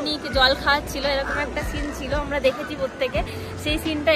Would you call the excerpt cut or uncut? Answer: uncut